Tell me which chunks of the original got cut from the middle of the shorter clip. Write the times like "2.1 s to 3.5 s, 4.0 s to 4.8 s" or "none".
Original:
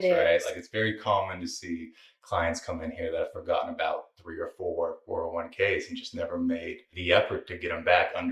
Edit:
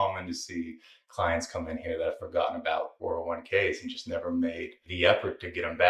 4.1 s to 5.0 s